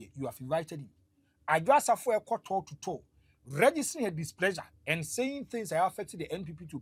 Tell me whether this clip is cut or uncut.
uncut